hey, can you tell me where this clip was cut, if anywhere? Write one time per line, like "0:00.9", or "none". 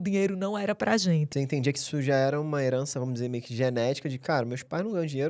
0:01.3